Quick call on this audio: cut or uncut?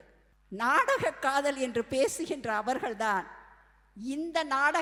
uncut